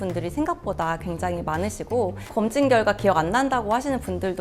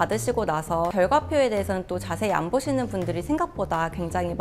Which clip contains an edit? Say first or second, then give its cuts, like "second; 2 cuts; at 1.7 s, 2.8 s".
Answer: second; 1 cut; at 0.9 s